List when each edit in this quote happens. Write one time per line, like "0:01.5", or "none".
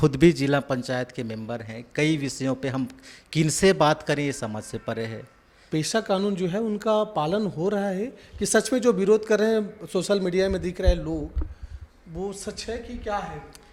0:05.5